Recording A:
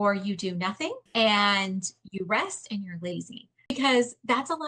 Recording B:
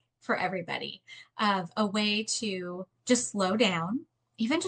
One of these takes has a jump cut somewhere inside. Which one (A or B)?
A